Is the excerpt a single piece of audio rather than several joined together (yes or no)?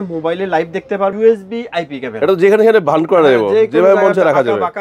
no